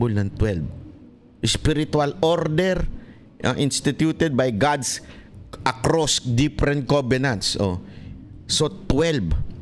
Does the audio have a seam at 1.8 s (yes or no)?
no